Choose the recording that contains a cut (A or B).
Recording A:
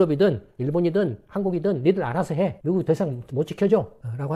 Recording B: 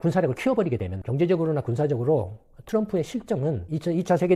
B